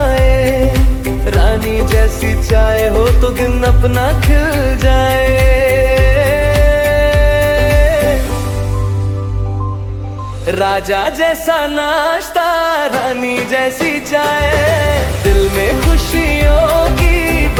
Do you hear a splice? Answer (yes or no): no